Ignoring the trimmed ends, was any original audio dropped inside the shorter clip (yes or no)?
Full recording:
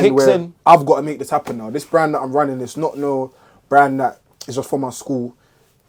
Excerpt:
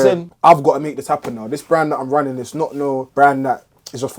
yes